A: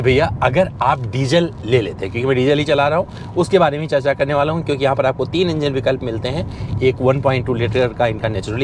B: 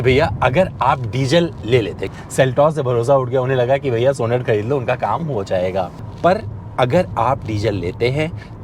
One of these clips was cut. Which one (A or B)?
B